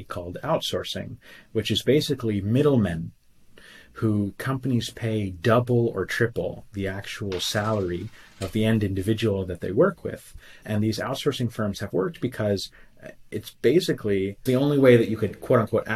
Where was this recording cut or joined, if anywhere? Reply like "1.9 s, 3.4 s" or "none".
10.6 s, 14.4 s